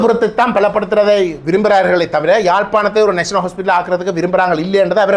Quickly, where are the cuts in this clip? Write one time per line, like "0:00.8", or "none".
none